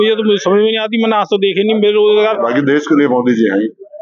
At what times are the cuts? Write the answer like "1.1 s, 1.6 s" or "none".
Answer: 2.5 s

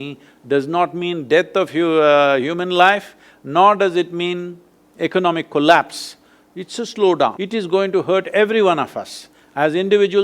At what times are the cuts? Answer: 7.4 s

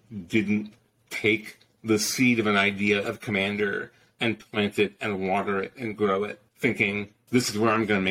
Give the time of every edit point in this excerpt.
4.0 s, 6.4 s, 7.2 s

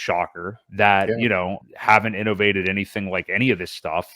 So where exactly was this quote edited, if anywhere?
1.6 s

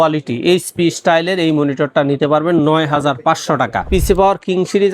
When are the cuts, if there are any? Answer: 3.8 s

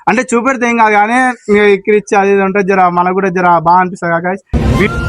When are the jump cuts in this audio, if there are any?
none

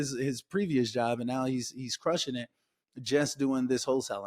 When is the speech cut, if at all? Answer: none

